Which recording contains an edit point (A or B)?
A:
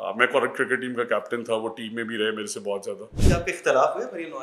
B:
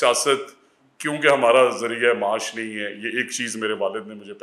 A